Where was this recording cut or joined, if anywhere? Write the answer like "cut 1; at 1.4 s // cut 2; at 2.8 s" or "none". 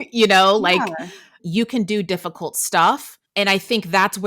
cut 1; at 1.4 s // cut 2; at 3.2 s